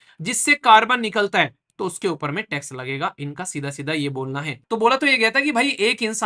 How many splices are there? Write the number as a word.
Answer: one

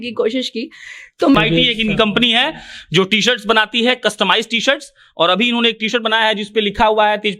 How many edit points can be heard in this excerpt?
one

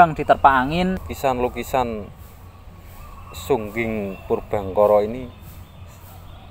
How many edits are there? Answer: one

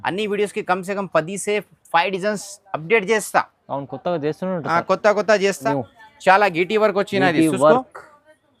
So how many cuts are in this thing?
one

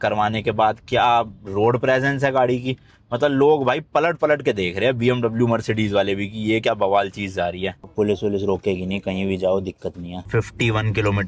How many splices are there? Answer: two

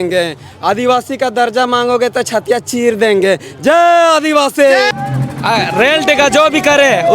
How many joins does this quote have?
one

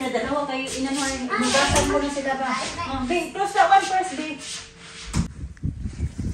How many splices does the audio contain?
one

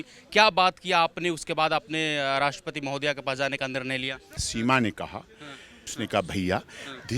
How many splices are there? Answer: two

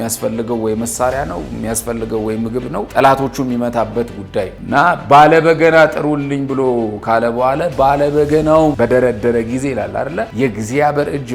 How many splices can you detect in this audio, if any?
two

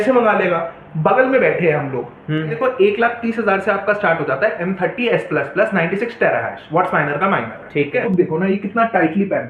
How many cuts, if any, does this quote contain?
two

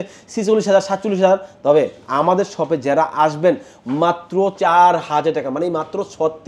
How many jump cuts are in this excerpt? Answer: one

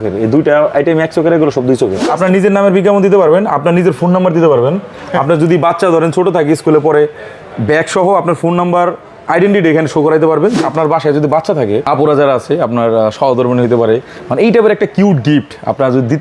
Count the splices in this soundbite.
two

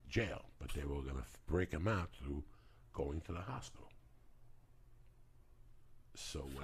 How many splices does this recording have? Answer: zero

